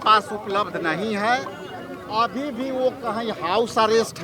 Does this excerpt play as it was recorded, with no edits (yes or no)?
yes